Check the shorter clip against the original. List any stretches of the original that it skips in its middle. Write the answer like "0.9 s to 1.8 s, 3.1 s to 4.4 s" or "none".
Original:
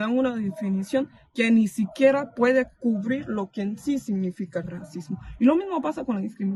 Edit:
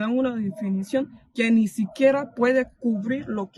none